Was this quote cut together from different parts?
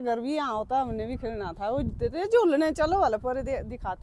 no; 0 cuts

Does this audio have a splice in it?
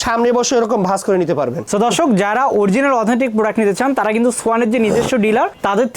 yes; 1 cut; at 1.6 s

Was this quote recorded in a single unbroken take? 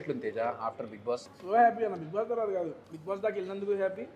no; 2 cuts; at 1.3 s, 2.9 s

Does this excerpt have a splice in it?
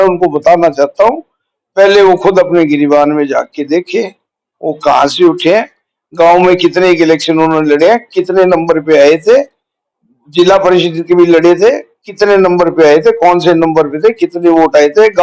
no; 0 cuts

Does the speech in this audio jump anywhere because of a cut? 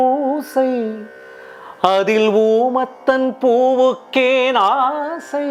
no; 0 cuts

